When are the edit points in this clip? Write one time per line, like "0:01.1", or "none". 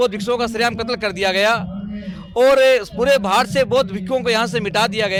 none

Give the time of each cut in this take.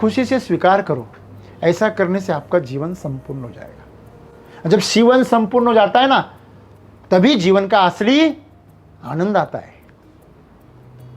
none

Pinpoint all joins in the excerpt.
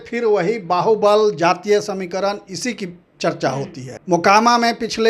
0:03.9

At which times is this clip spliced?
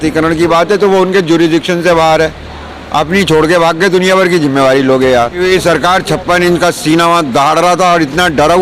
0:05.4

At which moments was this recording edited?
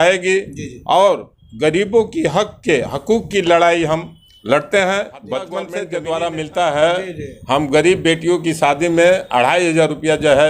0:05.7

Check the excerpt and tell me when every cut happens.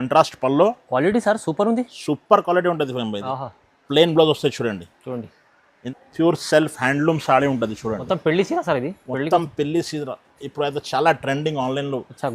0:05.8

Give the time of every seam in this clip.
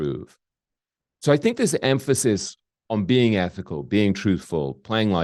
none

